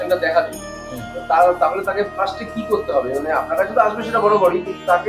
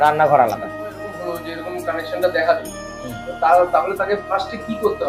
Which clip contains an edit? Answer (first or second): second